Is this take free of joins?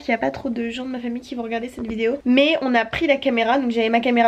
yes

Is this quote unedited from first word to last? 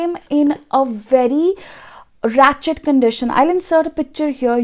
yes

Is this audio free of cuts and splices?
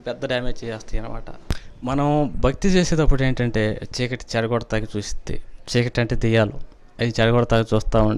no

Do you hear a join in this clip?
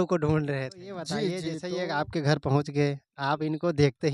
yes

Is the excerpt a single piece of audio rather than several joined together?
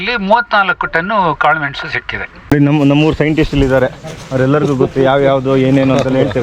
no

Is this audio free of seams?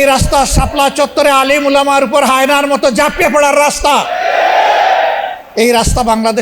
no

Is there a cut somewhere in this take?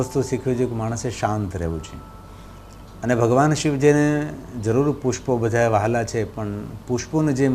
no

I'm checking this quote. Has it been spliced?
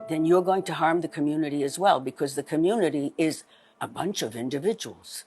yes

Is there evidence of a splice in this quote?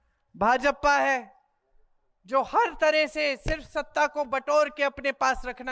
no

